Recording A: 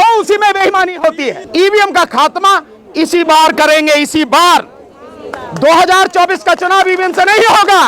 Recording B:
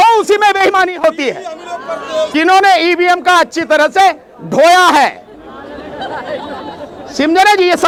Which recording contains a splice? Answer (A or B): A